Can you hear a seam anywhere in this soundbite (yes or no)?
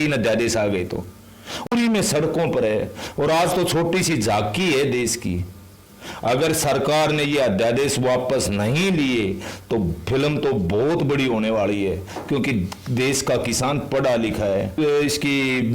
yes